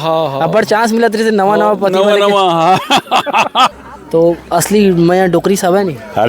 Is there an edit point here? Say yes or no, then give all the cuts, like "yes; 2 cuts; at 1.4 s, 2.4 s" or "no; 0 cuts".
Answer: yes; 1 cut; at 3.7 s